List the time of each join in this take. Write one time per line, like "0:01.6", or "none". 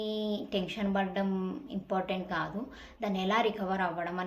none